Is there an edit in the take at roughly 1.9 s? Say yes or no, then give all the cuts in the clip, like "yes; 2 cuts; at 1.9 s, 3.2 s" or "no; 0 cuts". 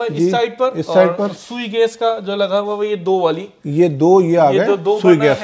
no; 0 cuts